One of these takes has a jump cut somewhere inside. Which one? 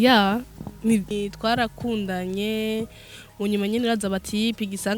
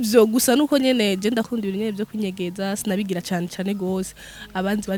first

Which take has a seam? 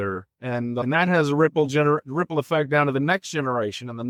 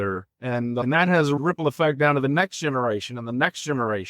second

